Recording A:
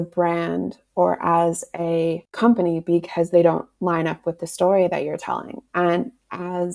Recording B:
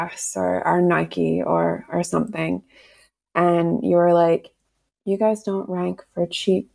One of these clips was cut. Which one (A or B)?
A